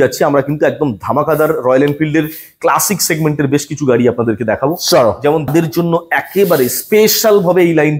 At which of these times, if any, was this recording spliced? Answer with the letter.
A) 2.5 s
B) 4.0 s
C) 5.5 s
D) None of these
C